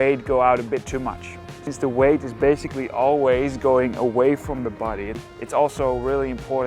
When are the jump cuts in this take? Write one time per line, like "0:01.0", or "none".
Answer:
0:01.6
0:05.2